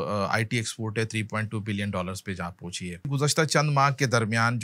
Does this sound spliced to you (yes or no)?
yes